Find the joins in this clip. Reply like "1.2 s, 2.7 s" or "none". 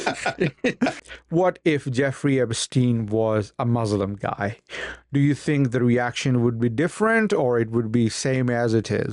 1.0 s